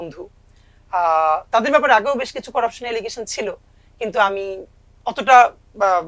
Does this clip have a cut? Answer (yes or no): no